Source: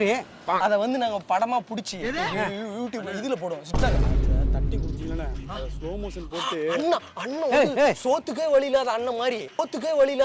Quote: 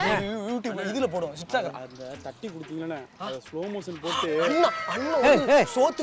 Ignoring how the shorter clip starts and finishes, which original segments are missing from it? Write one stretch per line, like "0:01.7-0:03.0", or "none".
none